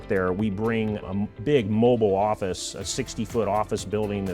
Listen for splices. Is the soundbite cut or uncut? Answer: uncut